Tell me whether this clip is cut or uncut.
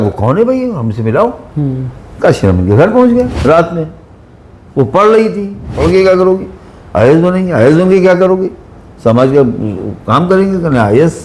cut